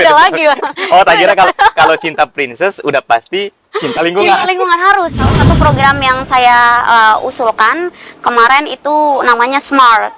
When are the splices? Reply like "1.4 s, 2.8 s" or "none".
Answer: 5.3 s